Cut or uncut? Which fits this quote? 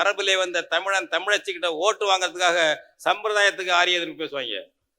uncut